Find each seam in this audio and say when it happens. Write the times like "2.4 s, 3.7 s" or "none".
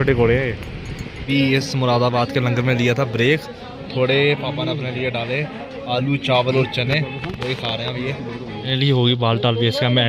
1.2 s, 8.5 s